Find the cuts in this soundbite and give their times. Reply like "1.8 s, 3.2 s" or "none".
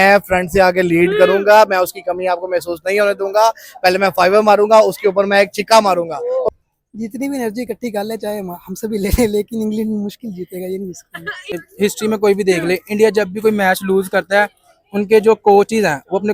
6.4 s, 11.5 s